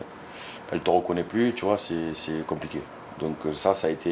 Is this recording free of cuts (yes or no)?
yes